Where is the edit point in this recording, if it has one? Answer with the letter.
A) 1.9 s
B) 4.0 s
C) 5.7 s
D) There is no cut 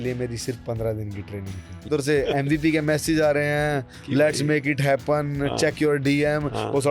A